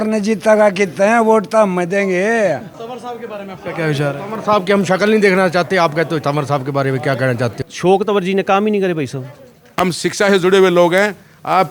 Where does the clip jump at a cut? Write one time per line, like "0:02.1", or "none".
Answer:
0:02.8
0:07.7
0:09.8